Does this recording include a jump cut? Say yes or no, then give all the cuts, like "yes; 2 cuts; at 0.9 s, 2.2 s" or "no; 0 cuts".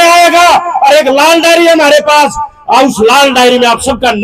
no; 0 cuts